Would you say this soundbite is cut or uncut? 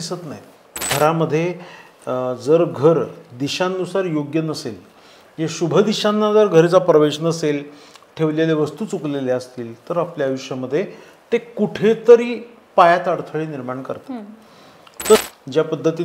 cut